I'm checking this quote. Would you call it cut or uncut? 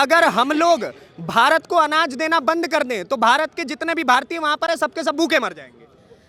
uncut